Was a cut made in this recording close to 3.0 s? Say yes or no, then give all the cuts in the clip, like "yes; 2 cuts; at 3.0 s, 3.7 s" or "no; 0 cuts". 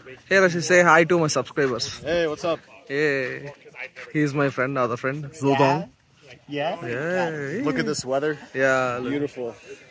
no; 0 cuts